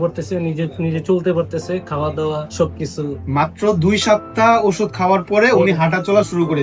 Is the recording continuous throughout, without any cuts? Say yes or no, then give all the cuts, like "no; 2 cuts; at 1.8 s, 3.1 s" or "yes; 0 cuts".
yes; 0 cuts